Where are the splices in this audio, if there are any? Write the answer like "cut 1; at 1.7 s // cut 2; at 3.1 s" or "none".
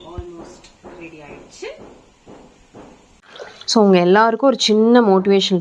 cut 1; at 3.2 s